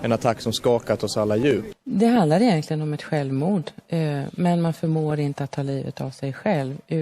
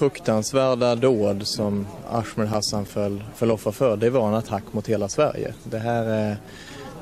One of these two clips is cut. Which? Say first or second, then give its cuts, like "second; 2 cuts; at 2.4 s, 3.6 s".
first; 1 cut; at 1.7 s